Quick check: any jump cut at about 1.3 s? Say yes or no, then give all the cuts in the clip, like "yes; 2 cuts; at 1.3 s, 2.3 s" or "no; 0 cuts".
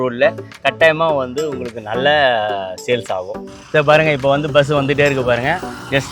no; 1 cut; at 3.4 s